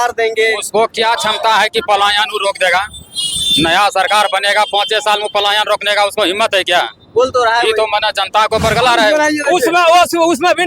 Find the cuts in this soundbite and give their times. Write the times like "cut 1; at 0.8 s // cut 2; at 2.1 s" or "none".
cut 1; at 9.1 s